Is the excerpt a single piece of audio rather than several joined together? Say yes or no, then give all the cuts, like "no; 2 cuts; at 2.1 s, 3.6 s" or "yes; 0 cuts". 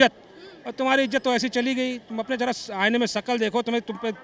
yes; 0 cuts